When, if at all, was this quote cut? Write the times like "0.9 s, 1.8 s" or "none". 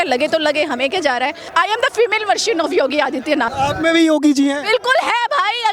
1.4 s, 3.5 s